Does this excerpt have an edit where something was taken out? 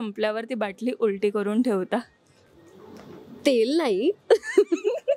no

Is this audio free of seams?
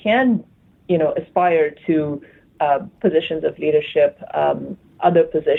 yes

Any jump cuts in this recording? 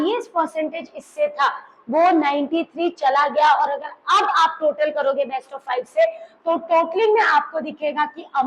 no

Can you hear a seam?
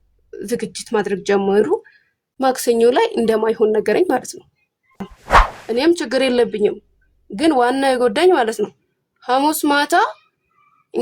yes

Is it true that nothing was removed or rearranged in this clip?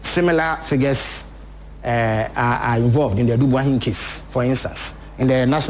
yes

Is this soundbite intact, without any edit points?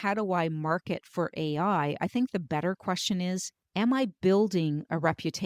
no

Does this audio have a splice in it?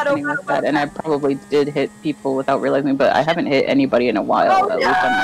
no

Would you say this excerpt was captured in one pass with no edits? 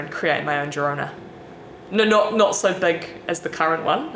yes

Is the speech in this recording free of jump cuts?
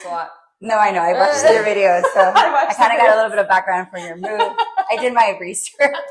yes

